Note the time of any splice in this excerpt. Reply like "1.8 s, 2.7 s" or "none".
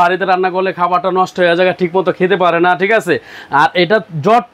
none